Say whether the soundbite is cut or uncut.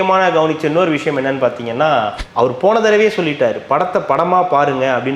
cut